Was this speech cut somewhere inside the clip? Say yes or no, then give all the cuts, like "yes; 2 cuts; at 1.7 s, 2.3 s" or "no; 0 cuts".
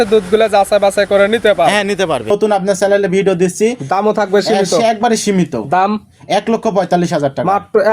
yes; 1 cut; at 2.3 s